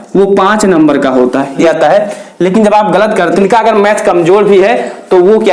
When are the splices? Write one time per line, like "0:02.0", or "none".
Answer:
0:01.6
0:03.4